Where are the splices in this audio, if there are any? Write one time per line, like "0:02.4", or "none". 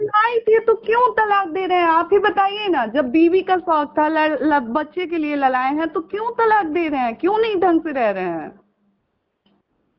none